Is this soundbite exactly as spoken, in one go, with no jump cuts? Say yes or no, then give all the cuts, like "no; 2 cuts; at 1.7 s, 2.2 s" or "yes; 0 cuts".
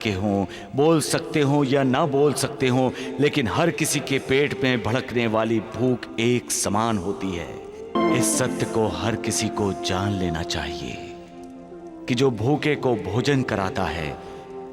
no; 1 cut; at 7.9 s